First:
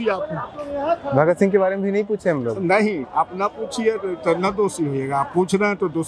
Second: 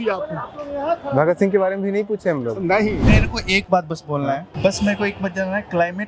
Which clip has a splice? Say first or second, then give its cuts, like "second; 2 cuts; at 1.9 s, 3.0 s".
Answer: second; 2 cuts; at 3.0 s, 4.5 s